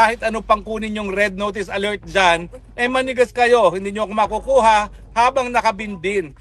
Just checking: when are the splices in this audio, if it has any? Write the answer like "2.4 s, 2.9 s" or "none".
none

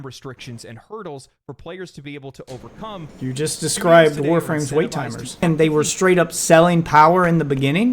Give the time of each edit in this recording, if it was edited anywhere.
3.1 s, 5.4 s

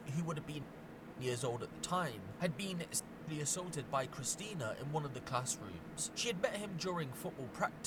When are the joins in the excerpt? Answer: none

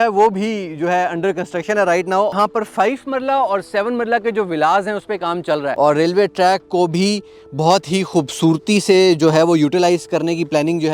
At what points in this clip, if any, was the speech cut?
2.3 s, 5.7 s

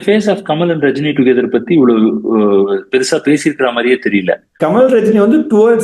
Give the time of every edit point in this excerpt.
4.5 s

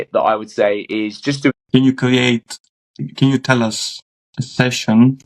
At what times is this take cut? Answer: 1.5 s

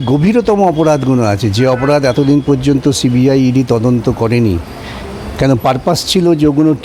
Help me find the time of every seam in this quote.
none

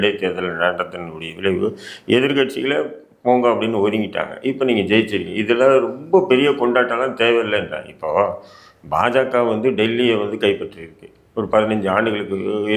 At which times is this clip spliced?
none

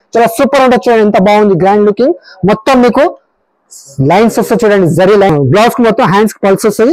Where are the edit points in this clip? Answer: 5.3 s

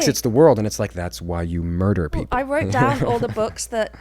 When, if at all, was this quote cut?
2.2 s

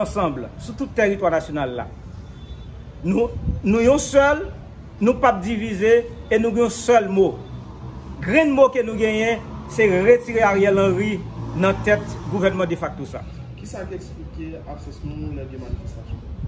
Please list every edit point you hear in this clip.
none

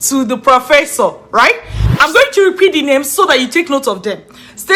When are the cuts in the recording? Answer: 1.8 s

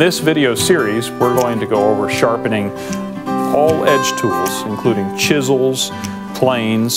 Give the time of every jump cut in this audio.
2.9 s

